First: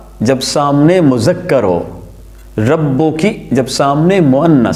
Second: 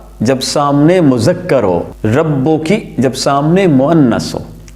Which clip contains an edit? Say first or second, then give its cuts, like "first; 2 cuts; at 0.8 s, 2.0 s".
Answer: second; 1 cut; at 1.9 s